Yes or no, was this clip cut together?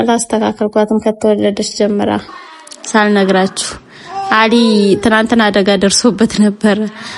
yes